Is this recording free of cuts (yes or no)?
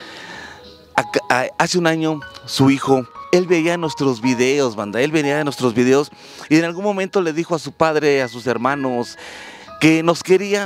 no